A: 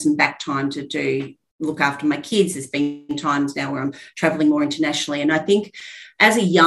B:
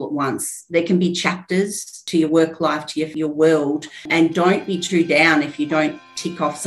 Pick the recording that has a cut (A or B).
B